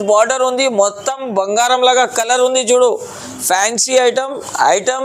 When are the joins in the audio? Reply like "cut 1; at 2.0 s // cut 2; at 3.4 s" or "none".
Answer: none